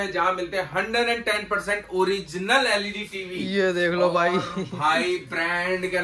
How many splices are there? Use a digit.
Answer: 0